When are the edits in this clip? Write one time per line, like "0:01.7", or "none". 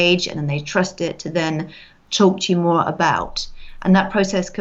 none